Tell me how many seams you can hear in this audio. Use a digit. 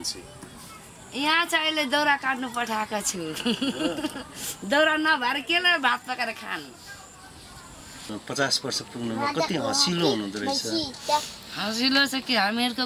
1